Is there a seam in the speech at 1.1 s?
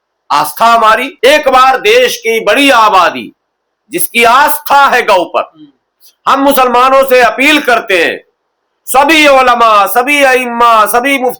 yes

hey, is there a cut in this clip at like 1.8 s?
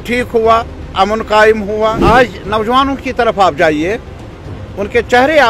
yes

